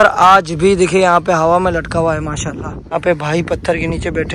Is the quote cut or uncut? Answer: cut